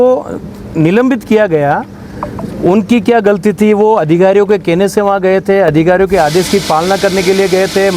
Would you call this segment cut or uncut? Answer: uncut